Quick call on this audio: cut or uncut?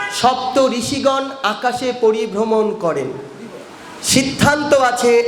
uncut